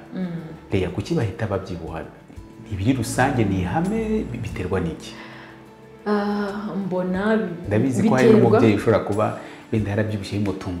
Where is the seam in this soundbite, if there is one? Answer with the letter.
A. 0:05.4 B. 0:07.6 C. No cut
C